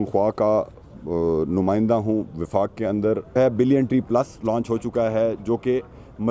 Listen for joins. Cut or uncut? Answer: cut